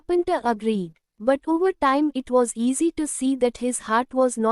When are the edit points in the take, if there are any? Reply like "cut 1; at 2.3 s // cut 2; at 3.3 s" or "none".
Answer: cut 1; at 1.0 s